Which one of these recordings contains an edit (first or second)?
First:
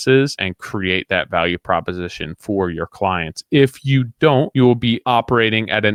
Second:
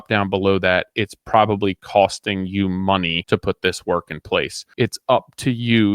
second